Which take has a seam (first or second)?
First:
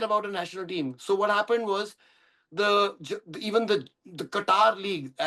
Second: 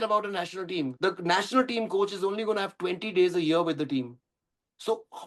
second